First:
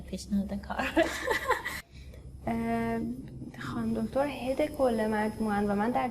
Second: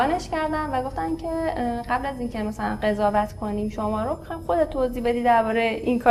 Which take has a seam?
first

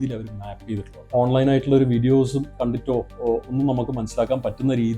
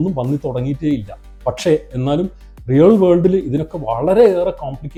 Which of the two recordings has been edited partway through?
first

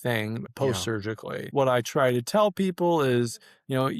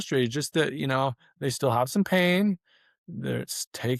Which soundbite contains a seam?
first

